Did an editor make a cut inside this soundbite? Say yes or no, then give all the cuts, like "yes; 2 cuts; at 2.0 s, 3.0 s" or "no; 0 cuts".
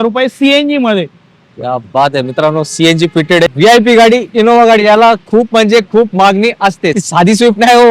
yes; 2 cuts; at 3.5 s, 7.0 s